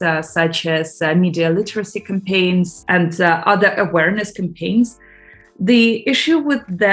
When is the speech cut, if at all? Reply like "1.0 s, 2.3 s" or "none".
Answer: 2.7 s, 4.9 s